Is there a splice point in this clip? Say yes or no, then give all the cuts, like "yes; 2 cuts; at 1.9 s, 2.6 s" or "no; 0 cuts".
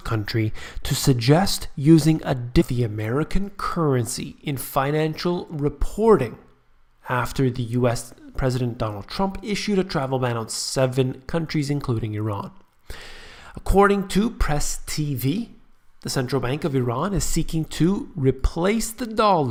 no; 0 cuts